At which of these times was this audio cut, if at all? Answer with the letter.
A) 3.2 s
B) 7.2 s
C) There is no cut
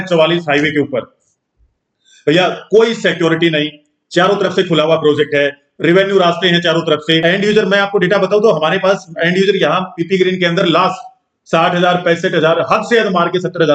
B